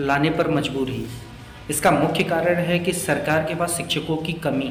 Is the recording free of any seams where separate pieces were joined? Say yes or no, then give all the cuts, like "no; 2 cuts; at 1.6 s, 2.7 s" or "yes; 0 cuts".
yes; 0 cuts